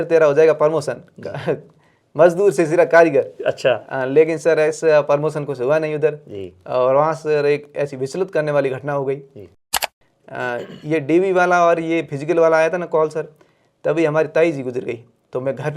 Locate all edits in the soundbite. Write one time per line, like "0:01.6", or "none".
0:09.7